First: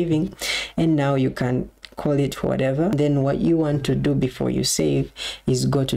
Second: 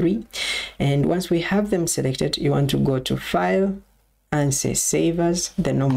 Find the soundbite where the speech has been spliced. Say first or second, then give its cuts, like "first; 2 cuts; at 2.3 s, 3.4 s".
first; 1 cut; at 2.9 s